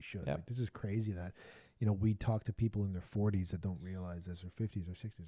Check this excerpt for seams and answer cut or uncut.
uncut